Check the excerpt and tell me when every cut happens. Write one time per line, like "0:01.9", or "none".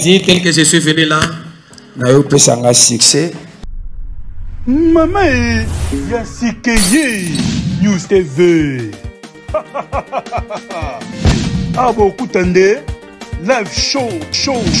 0:03.7